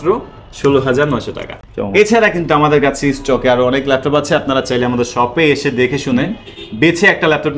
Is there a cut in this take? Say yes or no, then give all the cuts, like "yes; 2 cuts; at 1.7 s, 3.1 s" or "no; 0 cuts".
no; 0 cuts